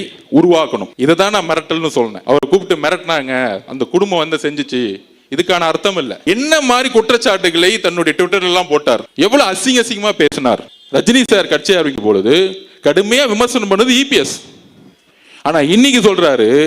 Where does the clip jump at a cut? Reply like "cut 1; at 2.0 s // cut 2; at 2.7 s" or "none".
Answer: cut 1; at 6.1 s // cut 2; at 10.6 s

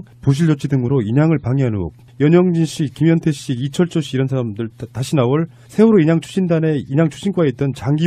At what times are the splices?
none

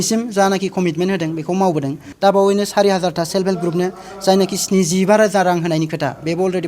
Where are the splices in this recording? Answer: cut 1; at 2.0 s

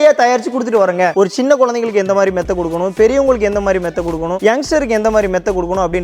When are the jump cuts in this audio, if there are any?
cut 1; at 1.1 s

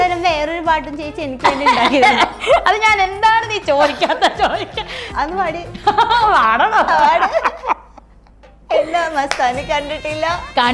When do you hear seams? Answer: cut 1; at 5.1 s

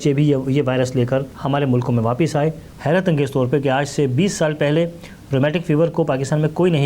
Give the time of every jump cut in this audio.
cut 1; at 1.3 s // cut 2; at 2.7 s

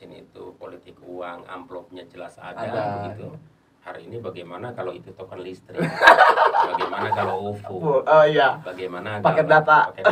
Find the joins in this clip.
none

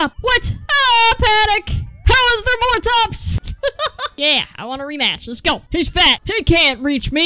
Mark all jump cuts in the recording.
none

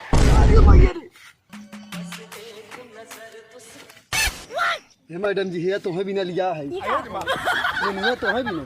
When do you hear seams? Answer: none

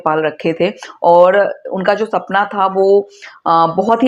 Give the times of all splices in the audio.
none

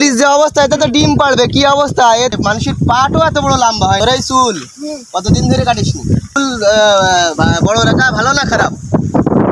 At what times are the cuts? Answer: cut 1; at 2.3 s // cut 2; at 4.0 s // cut 3; at 6.4 s

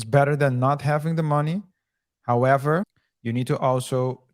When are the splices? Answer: cut 1; at 3.1 s

